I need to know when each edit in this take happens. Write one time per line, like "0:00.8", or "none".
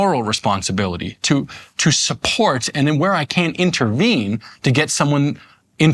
none